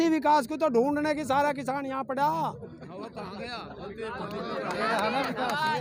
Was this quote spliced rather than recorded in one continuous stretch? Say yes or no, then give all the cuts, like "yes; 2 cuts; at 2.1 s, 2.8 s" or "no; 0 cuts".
no; 0 cuts